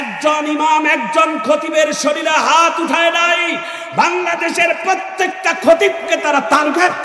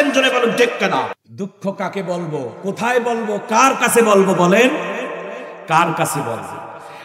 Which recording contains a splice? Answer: second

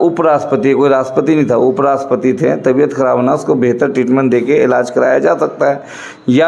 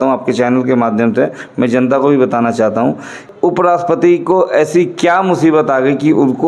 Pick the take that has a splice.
second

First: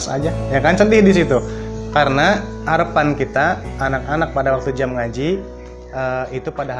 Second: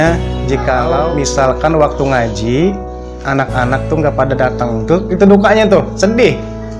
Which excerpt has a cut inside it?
second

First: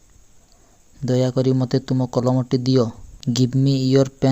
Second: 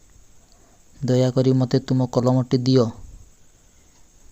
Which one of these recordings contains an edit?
first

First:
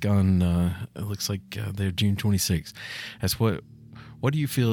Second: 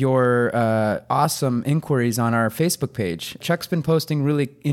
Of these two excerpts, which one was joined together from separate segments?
second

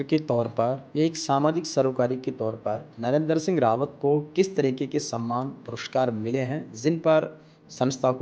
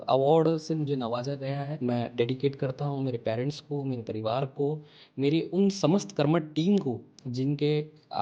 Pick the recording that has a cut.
second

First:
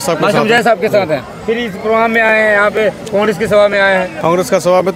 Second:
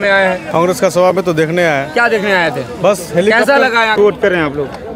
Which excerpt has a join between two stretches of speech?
second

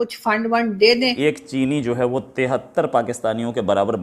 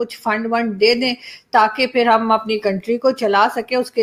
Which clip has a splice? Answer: first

